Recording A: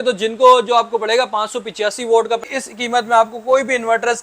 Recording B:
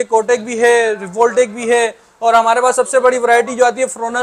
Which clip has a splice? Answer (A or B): A